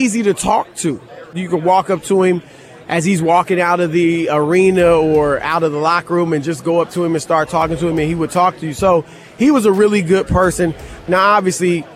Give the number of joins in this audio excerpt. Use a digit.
2